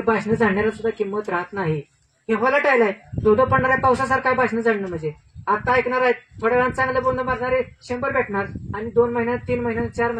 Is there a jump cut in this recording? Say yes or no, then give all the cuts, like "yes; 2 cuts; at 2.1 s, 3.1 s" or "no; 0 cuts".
no; 0 cuts